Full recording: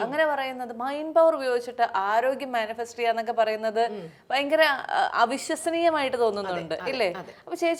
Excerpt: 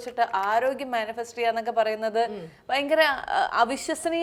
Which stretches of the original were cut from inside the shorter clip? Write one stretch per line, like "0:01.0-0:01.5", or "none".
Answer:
none